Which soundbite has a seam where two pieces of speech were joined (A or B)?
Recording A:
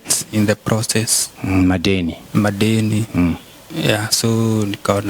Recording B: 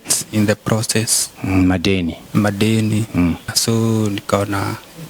B